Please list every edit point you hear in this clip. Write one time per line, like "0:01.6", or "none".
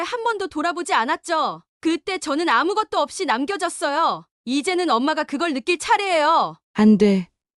0:06.6